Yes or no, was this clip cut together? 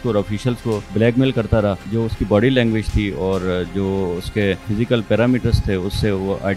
yes